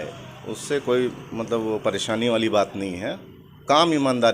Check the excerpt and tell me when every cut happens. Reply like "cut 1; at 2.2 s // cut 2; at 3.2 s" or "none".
none